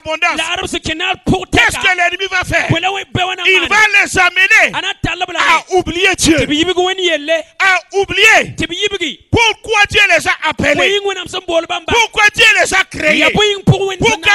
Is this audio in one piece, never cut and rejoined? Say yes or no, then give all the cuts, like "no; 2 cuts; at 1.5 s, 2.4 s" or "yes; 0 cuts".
yes; 0 cuts